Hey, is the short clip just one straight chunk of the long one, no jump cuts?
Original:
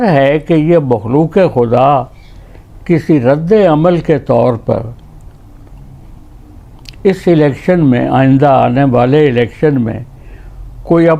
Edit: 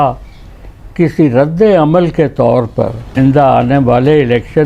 no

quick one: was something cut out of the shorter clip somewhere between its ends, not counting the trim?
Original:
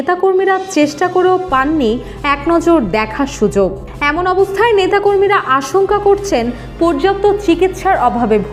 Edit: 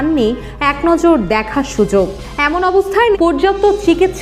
yes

